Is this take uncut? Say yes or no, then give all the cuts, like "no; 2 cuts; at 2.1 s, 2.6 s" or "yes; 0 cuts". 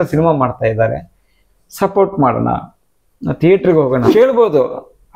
no; 1 cut; at 4.1 s